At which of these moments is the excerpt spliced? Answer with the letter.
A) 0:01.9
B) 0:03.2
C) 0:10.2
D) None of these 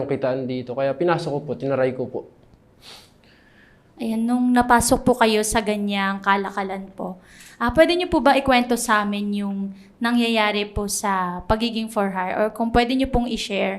D